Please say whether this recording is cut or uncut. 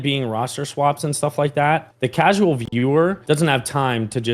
cut